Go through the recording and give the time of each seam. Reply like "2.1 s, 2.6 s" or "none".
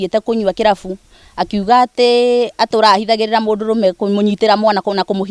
none